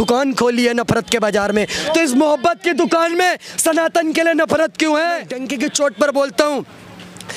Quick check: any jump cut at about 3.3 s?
no; 1 cut; at 5.4 s

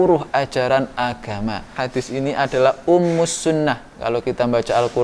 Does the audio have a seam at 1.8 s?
yes; 1 cut; at 1.8 s

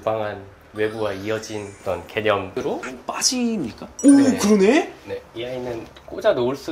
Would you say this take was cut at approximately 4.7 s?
no; 1 cut; at 2.9 s

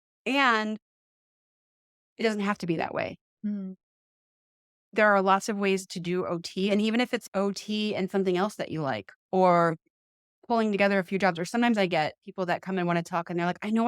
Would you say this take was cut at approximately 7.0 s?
no; 0 cuts

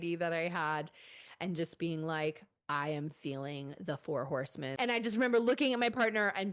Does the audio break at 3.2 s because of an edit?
no; 1 cut; at 4.6 s

